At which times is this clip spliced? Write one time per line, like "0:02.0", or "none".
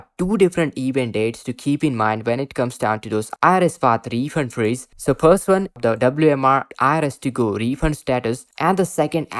0:05.8
0:08.5